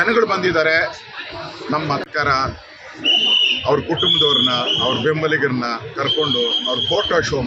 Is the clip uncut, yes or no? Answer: no